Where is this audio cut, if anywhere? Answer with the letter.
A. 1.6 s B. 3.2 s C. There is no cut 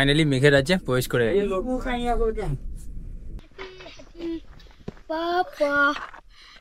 B